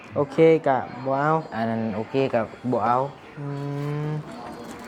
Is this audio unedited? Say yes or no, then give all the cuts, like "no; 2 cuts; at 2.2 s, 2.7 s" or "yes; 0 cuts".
yes; 0 cuts